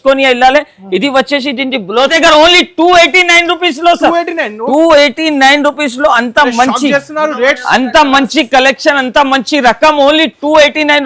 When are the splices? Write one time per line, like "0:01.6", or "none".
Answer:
0:02.1